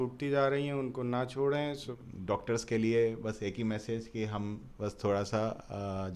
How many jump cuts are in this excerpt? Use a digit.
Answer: 1